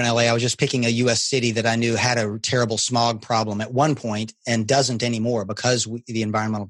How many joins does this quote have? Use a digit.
0